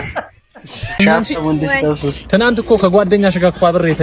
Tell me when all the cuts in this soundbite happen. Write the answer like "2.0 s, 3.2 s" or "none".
1.0 s